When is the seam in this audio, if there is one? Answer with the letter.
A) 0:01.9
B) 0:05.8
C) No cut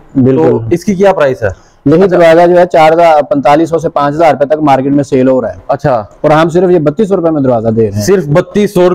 A